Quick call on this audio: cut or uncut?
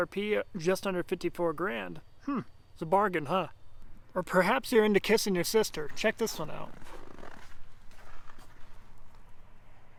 uncut